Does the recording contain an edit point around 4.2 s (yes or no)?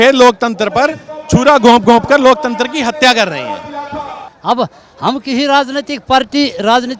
yes